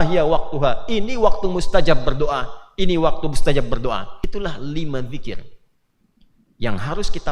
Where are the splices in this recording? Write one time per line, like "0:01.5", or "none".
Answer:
0:04.2